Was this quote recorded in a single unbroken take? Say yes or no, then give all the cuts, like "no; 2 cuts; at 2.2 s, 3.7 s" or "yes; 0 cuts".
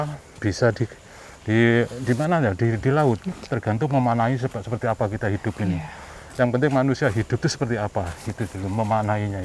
yes; 0 cuts